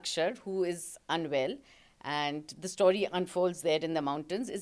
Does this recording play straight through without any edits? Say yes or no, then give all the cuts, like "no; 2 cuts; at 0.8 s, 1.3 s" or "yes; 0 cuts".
yes; 0 cuts